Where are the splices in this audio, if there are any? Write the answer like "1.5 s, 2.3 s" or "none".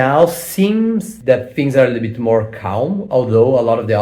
none